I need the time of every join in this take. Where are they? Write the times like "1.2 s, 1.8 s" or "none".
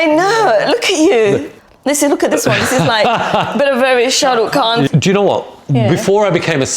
1.5 s, 4.9 s